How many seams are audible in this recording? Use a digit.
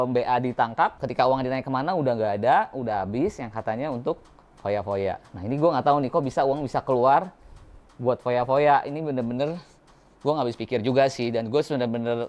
1